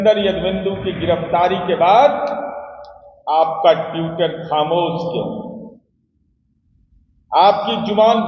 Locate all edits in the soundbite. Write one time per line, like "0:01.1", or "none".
none